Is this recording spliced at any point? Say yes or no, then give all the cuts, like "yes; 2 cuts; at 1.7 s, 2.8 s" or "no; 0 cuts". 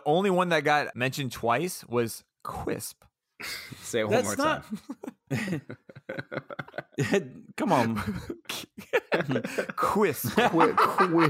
yes; 1 cut; at 0.9 s